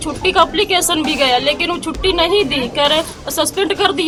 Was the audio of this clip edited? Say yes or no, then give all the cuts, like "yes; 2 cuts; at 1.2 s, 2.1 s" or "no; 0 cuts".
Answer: no; 0 cuts